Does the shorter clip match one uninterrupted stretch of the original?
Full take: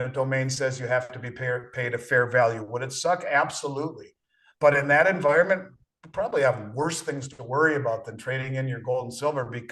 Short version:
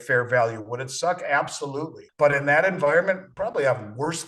no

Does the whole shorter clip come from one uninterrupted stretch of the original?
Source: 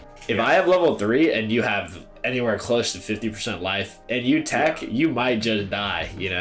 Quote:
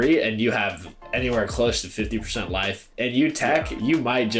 yes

